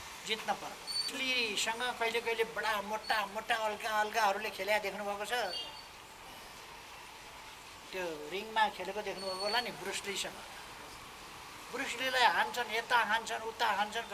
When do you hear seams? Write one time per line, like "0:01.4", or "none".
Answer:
0:01.1